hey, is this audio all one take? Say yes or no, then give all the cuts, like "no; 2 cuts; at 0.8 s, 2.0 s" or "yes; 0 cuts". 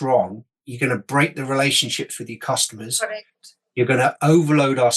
yes; 0 cuts